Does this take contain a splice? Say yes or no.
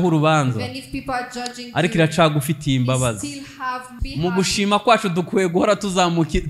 yes